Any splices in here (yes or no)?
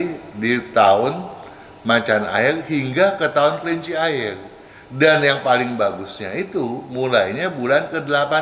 no